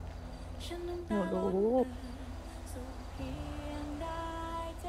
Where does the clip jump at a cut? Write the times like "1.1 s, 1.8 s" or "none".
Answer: none

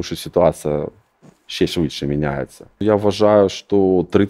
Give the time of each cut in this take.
2.8 s

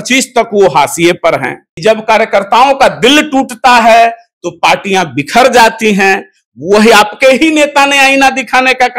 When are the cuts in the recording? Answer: 1.7 s

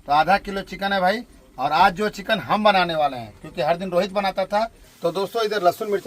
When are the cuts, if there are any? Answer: 4.8 s

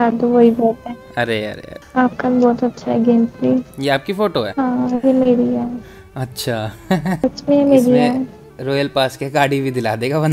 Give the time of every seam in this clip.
1.7 s, 4.5 s, 7.2 s

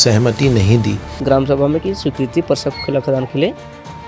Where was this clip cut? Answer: 1.1 s

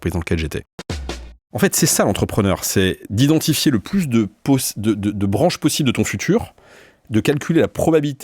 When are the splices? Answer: 1.1 s

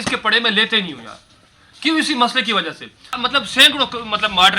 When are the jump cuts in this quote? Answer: 3.2 s

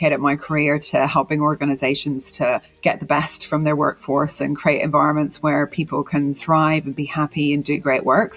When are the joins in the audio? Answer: 2.7 s

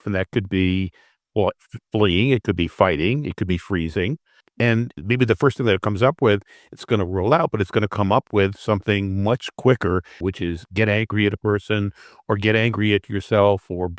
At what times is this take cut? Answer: 4.7 s, 10.2 s

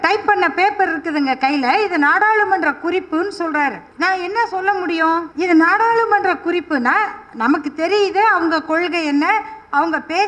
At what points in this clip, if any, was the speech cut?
3.9 s, 5.3 s

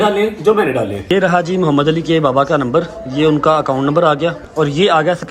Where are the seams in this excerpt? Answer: 1.0 s, 4.4 s

